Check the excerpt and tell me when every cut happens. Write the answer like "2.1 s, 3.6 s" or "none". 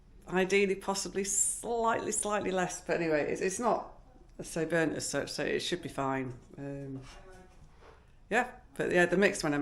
none